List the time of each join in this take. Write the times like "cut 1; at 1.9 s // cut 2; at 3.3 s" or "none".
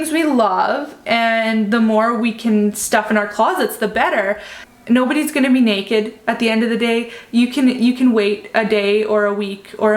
cut 1; at 4.6 s